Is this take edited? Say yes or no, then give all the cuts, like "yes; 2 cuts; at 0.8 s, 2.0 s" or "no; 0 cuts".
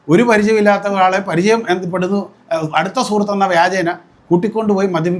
no; 0 cuts